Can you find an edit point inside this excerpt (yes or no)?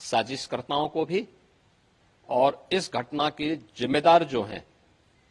no